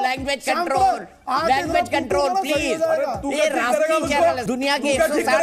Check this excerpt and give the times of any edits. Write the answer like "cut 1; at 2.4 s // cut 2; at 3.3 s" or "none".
none